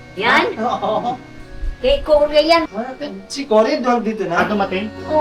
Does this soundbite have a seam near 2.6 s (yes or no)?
yes